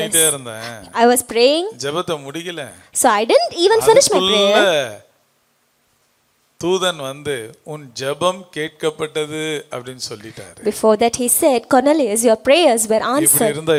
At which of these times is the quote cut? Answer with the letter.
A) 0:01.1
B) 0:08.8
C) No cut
C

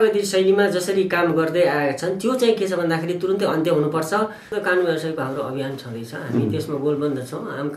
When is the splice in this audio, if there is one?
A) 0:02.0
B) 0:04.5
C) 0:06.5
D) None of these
B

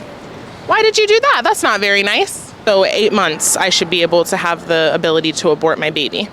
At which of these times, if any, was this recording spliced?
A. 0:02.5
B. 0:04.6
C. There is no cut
A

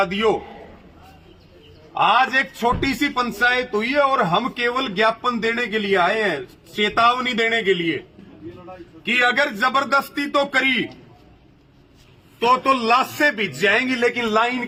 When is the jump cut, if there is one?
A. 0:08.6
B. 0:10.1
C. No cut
C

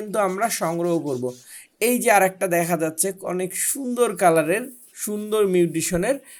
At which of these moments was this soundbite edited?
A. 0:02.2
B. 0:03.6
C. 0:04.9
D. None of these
D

